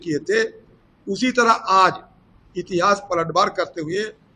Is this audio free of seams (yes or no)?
yes